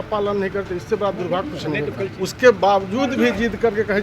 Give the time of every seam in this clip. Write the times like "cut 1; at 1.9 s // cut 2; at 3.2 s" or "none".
cut 1; at 2.0 s